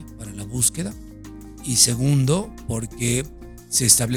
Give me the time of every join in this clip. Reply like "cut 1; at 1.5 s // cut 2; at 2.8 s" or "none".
none